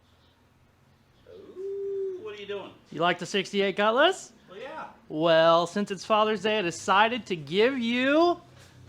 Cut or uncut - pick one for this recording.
cut